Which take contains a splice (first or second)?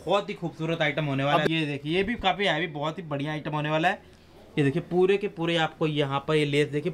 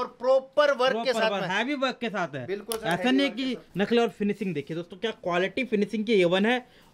first